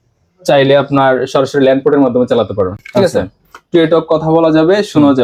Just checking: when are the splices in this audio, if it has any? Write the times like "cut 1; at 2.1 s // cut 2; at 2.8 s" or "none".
none